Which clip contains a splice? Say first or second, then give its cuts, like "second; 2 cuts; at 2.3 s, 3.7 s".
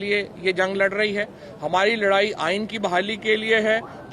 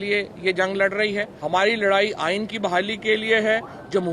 second; 1 cut; at 1.3 s